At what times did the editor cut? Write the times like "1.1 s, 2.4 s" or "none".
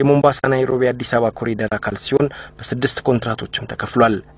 2.0 s